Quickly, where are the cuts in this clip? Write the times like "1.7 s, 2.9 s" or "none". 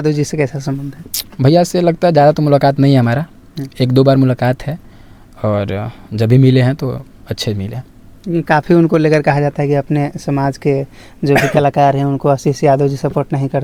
none